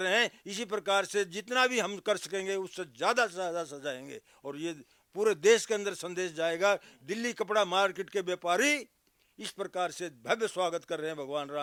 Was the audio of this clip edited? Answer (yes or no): no